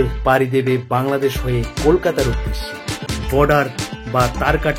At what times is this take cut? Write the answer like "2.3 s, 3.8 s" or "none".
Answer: 3.2 s